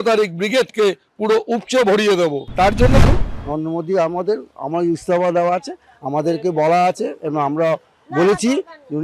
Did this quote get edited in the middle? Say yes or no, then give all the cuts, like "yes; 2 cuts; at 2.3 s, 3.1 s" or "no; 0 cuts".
yes; 1 cut; at 3.0 s